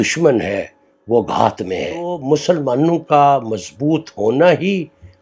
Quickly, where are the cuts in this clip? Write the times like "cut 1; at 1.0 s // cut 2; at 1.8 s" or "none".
cut 1; at 2.2 s